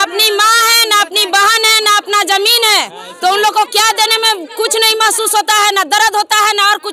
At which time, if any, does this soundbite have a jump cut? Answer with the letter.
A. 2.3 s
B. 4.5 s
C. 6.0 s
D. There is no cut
D